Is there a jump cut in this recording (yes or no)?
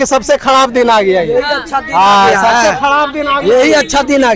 no